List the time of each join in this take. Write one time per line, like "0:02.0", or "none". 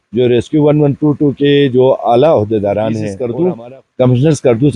0:03.1